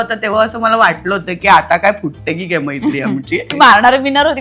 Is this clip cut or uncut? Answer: cut